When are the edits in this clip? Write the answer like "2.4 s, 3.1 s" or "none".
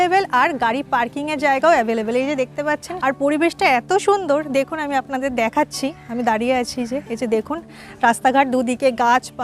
2.9 s